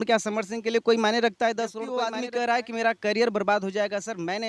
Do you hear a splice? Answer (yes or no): yes